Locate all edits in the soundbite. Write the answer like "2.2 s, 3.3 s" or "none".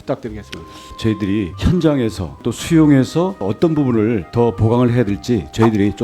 0.9 s, 3.4 s